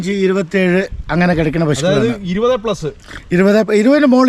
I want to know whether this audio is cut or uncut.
uncut